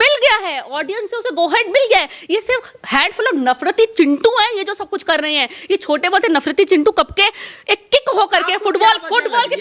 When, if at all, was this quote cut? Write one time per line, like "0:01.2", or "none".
none